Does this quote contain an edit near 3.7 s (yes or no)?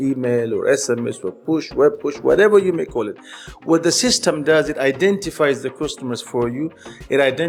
no